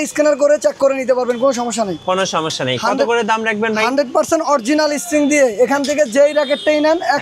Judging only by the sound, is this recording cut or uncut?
uncut